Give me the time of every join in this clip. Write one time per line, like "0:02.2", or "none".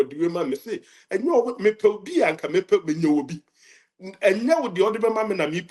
none